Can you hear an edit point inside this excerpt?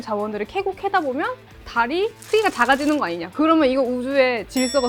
no; 0 cuts

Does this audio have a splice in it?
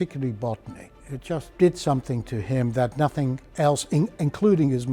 yes; 2 cuts; at 0.8 s, 3.4 s

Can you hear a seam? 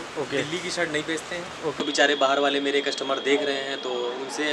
yes; 1 cut; at 1.8 s

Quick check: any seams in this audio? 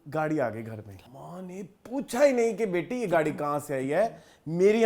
yes; 1 cut; at 0.9 s

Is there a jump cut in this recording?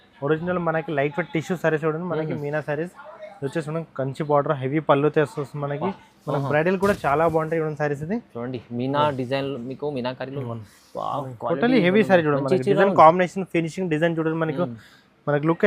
no; 0 cuts

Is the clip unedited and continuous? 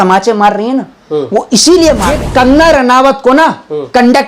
no; 1 cut; at 2.2 s

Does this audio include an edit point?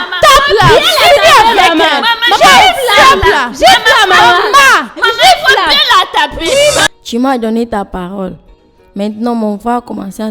yes; 1 cut; at 6.9 s

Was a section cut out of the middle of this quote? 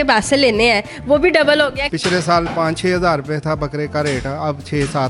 yes; 1 cut; at 1.8 s

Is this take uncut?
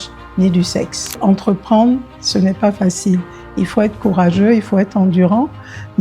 no; 1 cut; at 1.2 s

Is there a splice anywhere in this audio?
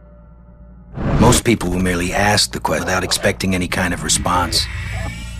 yes; 1 cut; at 2.8 s

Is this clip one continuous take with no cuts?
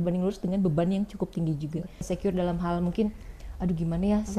no; 1 cut; at 2.0 s

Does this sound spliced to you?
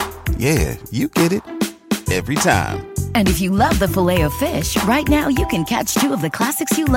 no; 0 cuts

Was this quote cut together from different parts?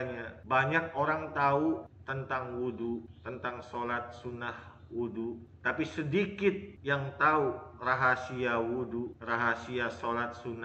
no; 0 cuts

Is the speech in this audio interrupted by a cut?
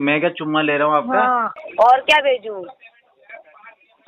yes; 1 cut; at 1.5 s

